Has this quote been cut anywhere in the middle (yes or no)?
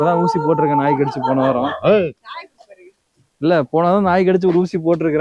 no